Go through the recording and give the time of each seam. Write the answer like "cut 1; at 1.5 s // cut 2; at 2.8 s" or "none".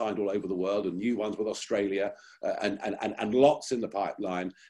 none

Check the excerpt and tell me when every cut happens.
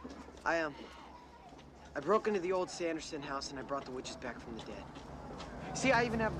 none

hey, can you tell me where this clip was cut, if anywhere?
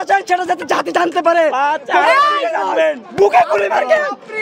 none

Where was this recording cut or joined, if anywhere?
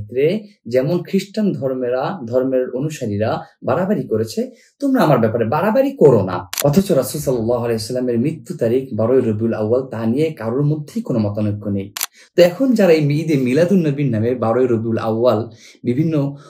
cut 1; at 6.5 s

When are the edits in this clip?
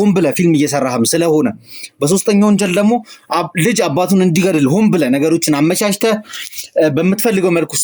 none

